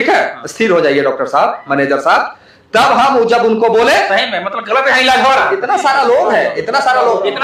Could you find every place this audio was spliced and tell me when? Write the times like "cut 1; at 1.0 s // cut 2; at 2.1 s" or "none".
none